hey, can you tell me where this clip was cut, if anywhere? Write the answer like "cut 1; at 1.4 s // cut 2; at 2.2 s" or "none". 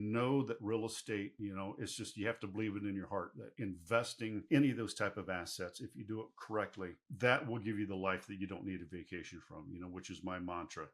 cut 1; at 1.3 s // cut 2; at 3.4 s